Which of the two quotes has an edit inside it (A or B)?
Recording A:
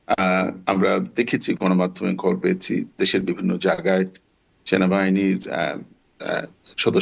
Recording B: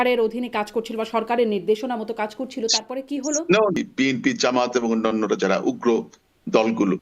B